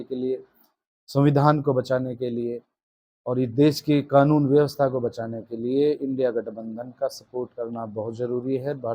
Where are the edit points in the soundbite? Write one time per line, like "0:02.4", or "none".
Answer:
none